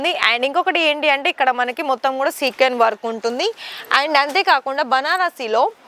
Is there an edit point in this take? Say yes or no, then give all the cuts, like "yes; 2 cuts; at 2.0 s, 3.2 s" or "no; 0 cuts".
no; 0 cuts